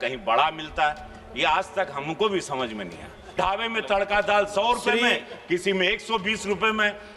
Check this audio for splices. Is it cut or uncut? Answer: cut